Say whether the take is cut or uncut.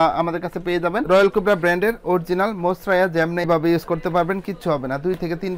cut